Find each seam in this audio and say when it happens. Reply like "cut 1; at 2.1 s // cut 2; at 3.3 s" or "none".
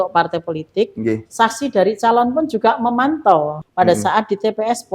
cut 1; at 3.6 s